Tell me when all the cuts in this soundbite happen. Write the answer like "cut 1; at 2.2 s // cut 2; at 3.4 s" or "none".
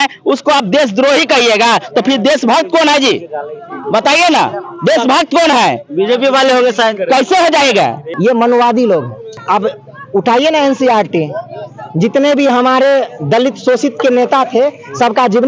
cut 1; at 8.0 s // cut 2; at 9.4 s